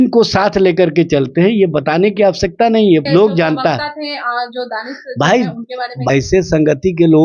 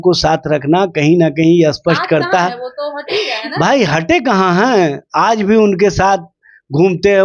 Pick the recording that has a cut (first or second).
first